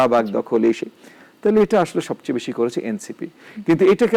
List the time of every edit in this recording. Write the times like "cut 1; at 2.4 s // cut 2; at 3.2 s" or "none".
none